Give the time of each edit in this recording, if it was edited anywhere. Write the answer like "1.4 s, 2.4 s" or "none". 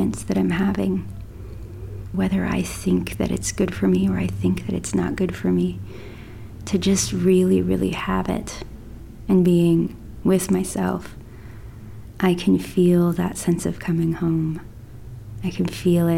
2.2 s, 9.1 s